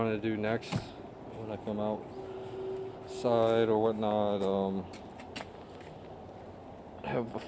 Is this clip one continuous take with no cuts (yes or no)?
no